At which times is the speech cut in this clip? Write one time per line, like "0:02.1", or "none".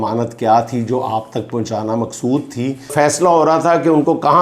0:02.9